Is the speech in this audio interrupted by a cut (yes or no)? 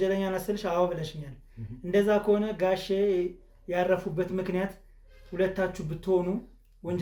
no